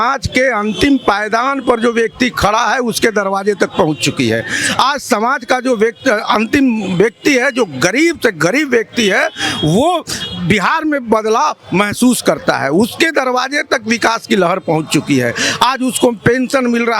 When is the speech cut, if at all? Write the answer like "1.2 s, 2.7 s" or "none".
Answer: none